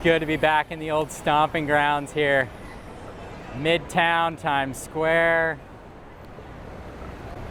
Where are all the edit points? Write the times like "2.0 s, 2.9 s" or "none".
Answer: none